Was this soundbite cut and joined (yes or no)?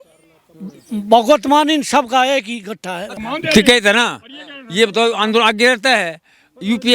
yes